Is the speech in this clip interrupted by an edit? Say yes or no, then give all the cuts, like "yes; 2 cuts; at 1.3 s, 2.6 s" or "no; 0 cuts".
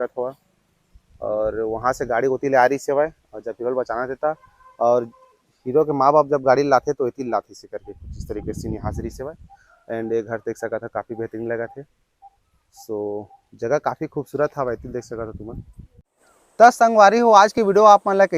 no; 0 cuts